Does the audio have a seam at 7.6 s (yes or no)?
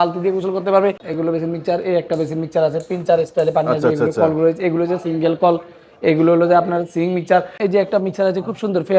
yes